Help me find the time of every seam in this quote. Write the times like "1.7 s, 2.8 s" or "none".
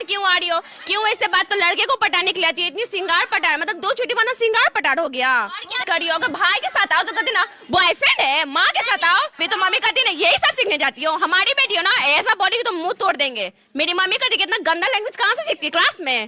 1.5 s, 5.8 s, 9.4 s